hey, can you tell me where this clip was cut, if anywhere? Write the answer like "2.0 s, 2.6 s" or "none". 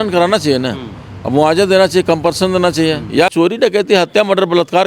3.3 s